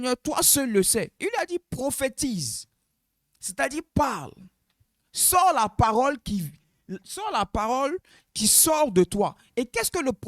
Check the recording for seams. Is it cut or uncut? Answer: cut